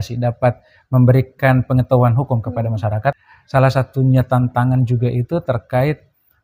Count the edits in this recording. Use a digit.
1